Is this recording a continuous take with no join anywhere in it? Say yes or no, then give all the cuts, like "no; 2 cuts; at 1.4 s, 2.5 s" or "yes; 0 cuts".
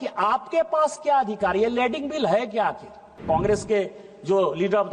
no; 1 cut; at 3.1 s